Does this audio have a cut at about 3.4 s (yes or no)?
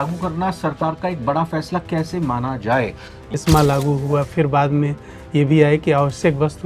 yes